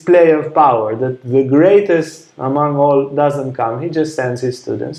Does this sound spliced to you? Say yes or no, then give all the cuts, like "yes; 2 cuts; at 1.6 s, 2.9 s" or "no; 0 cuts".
no; 0 cuts